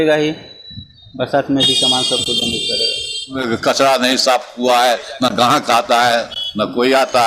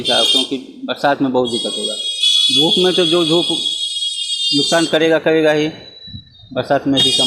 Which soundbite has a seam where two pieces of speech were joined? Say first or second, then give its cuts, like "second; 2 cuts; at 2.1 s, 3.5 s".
first; 1 cut; at 3.4 s